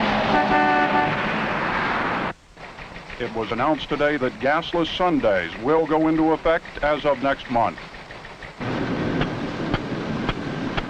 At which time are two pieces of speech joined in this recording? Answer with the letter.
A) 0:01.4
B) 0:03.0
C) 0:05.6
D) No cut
A